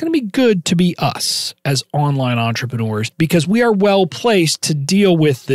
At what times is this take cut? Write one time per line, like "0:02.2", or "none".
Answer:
0:03.1